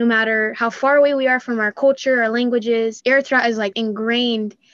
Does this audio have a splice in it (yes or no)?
yes